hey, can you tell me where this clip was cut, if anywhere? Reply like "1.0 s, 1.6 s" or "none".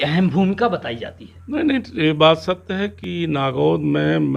none